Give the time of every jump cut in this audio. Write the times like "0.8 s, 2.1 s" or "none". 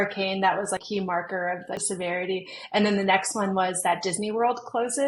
0.8 s, 1.8 s